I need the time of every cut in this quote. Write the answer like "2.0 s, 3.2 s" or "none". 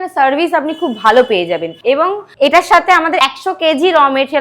1.7 s